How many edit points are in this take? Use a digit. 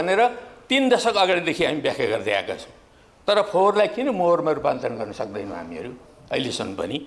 0